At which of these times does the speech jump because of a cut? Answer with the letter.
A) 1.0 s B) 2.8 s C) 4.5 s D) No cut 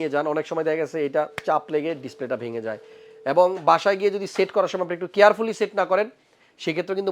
D